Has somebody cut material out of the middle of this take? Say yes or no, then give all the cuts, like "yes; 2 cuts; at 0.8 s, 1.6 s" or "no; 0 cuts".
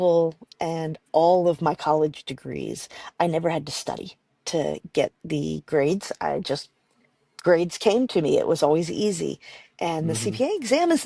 no; 0 cuts